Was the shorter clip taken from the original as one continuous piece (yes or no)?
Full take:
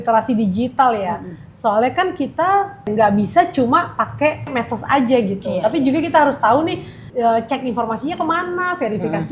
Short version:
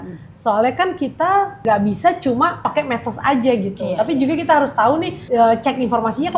no